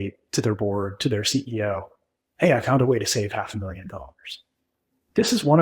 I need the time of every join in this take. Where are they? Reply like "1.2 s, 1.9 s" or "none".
none